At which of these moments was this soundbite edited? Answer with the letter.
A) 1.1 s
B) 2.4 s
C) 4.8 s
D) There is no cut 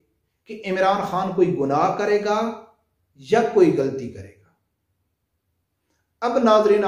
D